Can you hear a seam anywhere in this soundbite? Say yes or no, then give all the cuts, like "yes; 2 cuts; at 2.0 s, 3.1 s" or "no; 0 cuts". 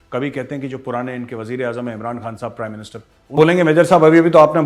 yes; 1 cut; at 3.3 s